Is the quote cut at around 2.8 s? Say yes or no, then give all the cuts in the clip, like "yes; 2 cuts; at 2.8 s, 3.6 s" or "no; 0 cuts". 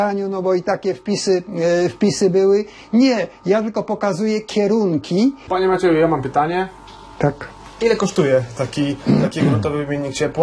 no; 1 cut; at 5.4 s